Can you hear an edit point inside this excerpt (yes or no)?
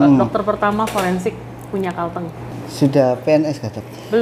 yes